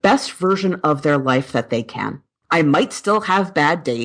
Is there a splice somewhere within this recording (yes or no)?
yes